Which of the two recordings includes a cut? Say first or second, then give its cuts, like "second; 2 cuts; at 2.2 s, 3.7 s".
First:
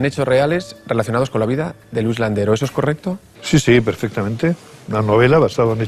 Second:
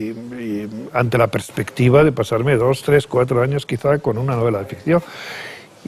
second; 1 cut; at 1.3 s